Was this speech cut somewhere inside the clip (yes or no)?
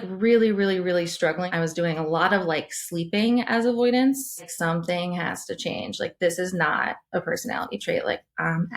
yes